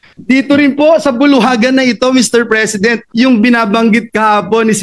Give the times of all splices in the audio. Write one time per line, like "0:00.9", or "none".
0:03.0